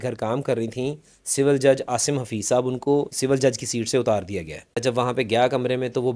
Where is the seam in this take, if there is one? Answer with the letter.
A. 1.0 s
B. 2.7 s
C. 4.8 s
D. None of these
C